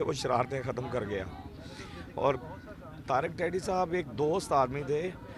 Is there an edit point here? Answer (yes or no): no